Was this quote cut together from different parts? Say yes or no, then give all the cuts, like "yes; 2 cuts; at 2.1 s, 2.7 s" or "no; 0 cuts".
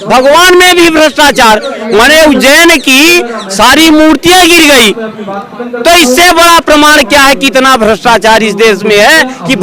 no; 0 cuts